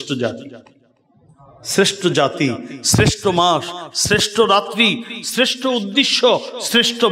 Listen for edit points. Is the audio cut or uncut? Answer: uncut